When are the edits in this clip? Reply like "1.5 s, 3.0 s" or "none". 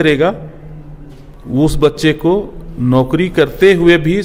none